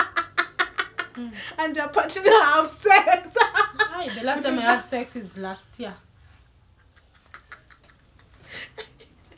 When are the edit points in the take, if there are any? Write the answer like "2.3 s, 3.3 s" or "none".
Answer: none